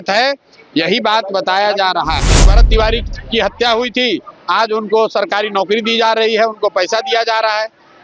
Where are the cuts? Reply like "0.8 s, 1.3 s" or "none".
2.5 s